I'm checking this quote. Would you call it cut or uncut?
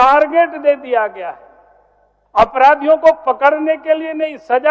uncut